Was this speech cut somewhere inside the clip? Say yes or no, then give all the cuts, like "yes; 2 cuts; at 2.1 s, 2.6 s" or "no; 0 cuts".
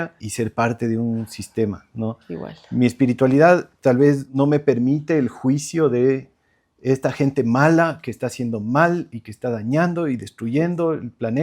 yes; 1 cut; at 4.3 s